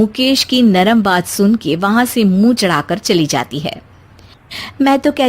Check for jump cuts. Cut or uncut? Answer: uncut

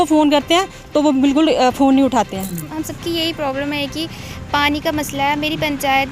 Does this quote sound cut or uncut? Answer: cut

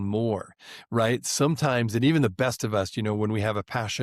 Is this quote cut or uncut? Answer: uncut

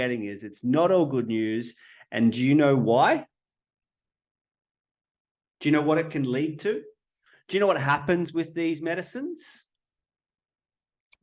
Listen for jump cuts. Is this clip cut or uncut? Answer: uncut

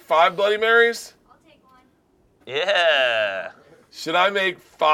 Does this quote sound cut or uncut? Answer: uncut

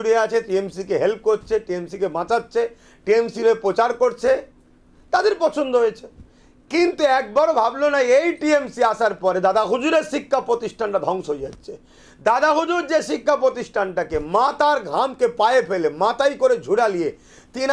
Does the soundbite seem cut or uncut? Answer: uncut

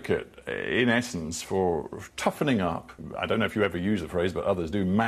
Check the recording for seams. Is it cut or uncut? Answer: cut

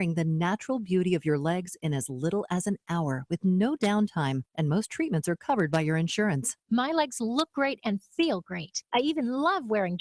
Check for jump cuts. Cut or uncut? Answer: uncut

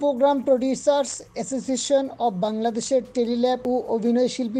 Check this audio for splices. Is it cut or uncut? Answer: cut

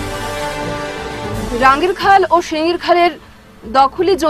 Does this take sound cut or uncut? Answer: cut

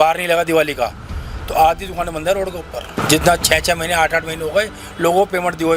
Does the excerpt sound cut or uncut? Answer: cut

